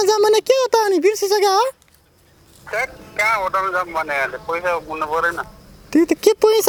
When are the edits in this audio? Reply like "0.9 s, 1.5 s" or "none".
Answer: none